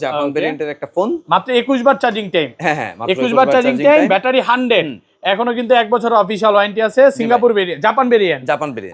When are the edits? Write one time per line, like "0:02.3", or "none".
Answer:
none